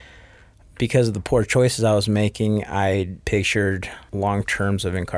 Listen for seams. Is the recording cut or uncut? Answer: cut